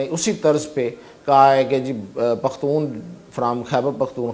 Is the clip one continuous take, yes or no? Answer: yes